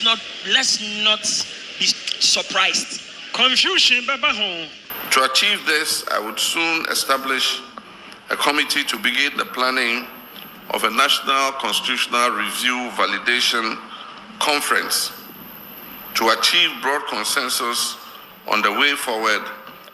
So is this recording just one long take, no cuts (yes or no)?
no